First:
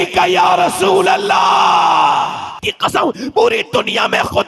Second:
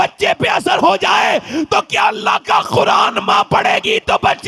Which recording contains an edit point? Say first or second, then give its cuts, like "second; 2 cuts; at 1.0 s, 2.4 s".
first; 1 cut; at 2.7 s